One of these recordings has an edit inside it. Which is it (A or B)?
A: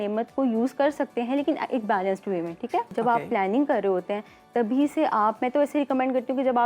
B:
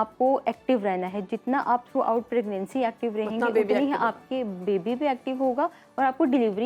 A